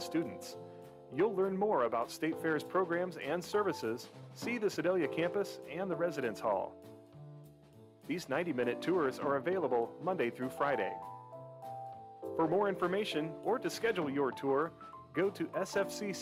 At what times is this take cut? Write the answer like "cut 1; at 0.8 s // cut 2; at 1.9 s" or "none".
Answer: none